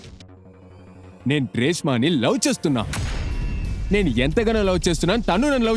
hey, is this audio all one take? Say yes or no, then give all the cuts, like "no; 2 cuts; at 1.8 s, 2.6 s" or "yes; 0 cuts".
no; 1 cut; at 1.2 s